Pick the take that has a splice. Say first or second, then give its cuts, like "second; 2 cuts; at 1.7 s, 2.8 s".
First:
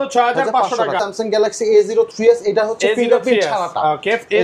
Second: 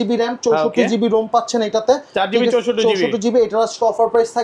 first; 1 cut; at 1.0 s